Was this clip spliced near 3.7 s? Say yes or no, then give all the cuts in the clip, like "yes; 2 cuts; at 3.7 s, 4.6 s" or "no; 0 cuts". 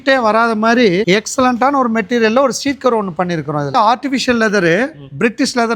yes; 1 cut; at 3.7 s